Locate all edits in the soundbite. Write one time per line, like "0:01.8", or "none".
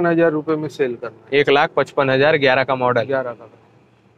none